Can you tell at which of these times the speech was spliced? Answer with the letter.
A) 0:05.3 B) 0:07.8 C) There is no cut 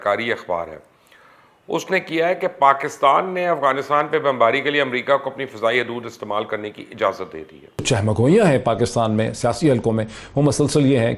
B